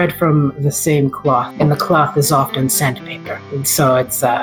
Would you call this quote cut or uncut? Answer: uncut